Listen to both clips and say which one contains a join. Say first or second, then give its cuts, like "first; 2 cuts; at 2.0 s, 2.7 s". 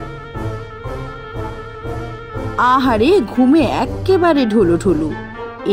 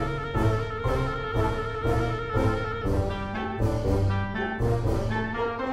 first; 1 cut; at 2.5 s